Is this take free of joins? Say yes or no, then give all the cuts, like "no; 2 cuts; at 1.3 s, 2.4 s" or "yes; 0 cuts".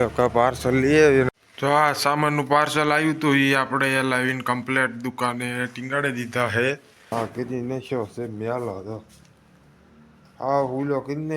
no; 2 cuts; at 1.3 s, 7.1 s